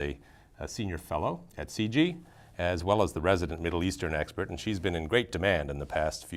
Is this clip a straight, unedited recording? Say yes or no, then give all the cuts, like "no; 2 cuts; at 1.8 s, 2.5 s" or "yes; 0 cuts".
yes; 0 cuts